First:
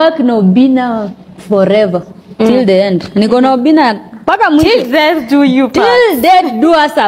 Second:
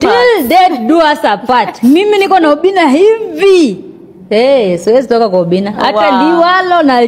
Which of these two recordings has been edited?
first; 1 cut; at 3.3 s

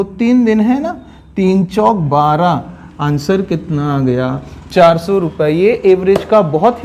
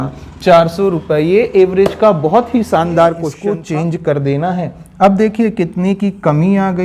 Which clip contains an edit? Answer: second; 1 cut; at 3.5 s

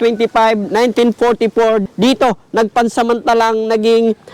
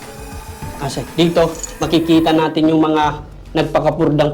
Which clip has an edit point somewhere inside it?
first; 1 cut; at 1.9 s

